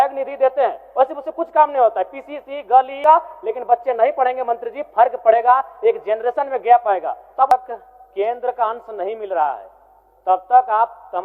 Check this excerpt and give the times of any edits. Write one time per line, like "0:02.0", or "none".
0:03.0
0:07.5

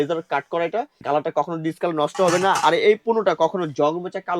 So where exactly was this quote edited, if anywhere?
0:01.0

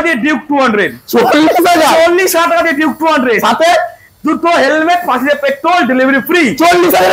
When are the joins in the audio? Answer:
none

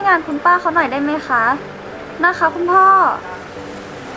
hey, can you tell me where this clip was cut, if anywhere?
none

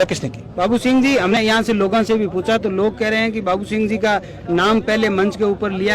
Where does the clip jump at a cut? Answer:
0:01.4

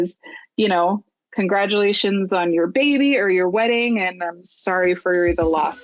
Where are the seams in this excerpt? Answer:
none

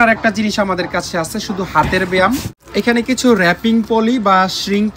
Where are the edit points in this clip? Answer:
0:02.5

